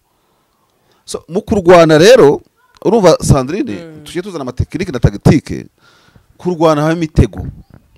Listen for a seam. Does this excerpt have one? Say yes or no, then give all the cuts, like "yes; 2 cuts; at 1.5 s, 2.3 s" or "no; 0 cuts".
no; 0 cuts